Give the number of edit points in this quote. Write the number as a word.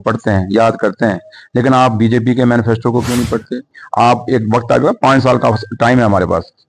one